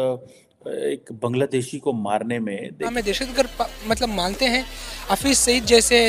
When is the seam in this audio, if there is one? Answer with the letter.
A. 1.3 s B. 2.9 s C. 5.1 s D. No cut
B